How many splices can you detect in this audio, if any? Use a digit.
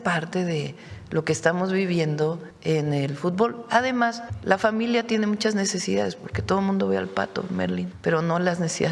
3